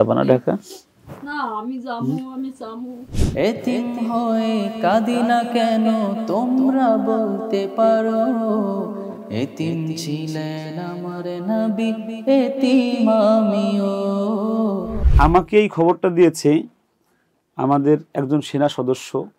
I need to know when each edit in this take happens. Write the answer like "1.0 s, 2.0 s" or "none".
3.2 s, 15.0 s